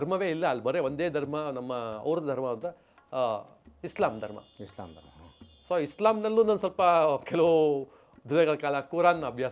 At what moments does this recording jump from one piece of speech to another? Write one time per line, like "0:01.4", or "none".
none